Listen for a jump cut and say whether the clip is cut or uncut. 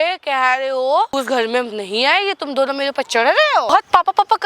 cut